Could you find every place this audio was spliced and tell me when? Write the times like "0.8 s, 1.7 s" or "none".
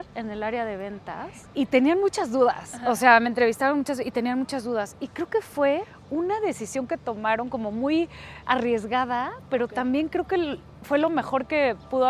1.4 s, 6.0 s

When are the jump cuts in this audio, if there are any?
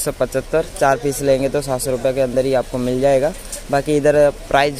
none

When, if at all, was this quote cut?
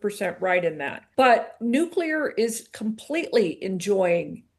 0.9 s, 1.6 s

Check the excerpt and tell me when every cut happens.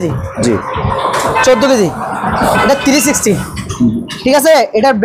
none

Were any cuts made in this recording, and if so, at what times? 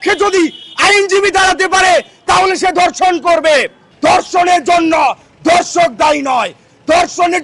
3.8 s

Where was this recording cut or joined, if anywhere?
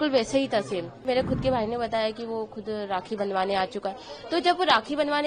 1.0 s

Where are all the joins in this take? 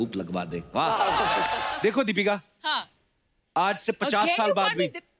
1.7 s

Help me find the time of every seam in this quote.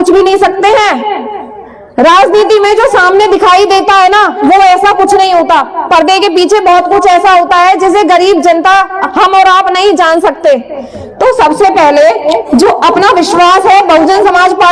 none

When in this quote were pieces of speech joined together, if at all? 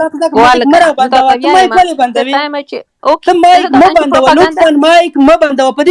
none

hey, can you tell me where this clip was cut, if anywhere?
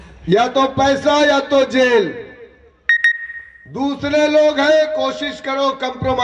none

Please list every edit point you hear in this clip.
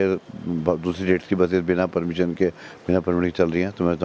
none

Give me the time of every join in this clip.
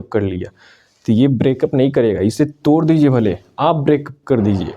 none

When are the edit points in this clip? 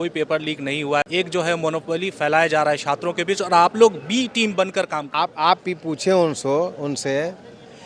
1.0 s, 5.0 s

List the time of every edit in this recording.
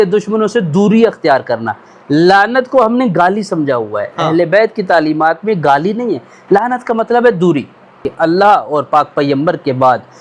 8.0 s

